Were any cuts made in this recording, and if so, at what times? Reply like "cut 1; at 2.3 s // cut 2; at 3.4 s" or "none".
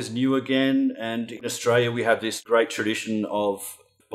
cut 1; at 1.4 s // cut 2; at 2.3 s